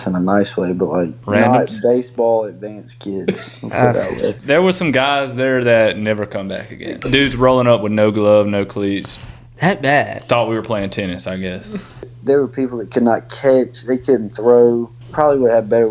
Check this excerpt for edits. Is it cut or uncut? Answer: cut